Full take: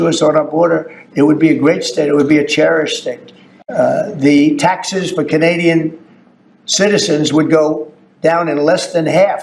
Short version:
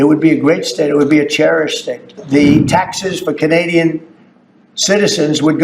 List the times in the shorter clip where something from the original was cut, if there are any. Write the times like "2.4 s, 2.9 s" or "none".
2.2 s